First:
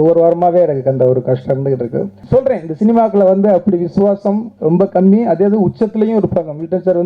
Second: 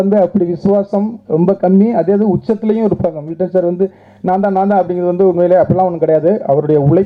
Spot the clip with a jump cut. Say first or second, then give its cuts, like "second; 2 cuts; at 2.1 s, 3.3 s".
first; 1 cut; at 2.2 s